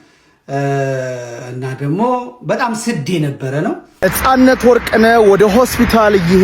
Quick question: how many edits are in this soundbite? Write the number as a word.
one